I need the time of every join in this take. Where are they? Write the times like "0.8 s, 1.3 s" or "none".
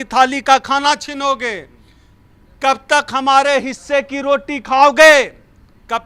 none